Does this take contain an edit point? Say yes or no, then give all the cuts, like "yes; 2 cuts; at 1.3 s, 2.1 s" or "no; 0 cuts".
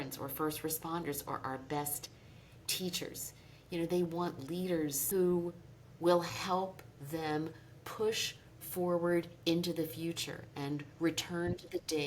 yes; 1 cut; at 5.0 s